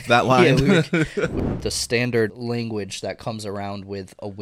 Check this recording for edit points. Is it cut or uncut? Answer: cut